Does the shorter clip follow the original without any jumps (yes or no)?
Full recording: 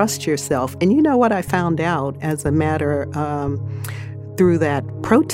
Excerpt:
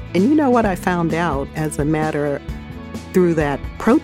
no